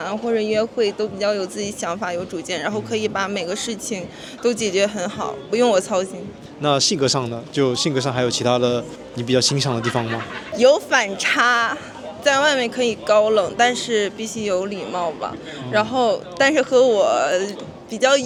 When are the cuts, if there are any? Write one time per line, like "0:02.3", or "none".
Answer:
none